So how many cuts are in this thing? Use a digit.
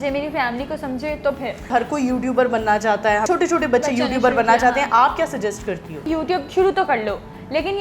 3